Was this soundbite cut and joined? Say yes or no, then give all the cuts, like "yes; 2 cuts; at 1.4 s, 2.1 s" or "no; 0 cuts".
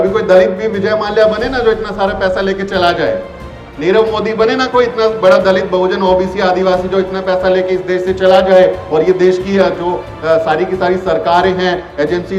no; 0 cuts